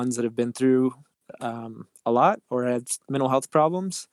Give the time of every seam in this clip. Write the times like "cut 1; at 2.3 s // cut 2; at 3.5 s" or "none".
none

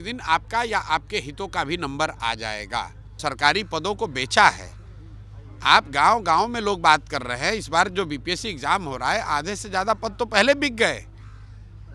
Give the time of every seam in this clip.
cut 1; at 3.0 s

